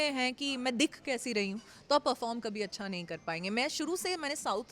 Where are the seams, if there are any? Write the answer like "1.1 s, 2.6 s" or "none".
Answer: none